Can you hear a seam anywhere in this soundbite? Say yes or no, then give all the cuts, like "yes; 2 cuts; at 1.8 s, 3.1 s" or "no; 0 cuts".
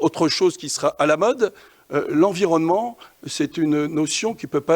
yes; 1 cut; at 1.8 s